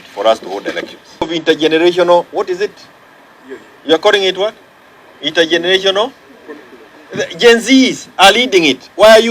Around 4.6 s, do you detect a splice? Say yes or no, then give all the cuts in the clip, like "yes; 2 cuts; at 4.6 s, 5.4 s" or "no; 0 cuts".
no; 1 cut; at 1.3 s